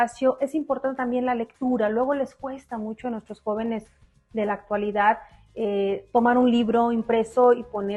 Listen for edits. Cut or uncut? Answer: uncut